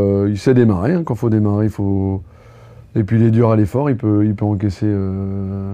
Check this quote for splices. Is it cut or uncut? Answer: uncut